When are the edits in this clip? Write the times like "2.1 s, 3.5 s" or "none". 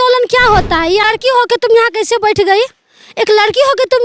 1.1 s